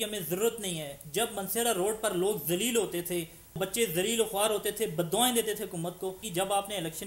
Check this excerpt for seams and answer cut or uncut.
cut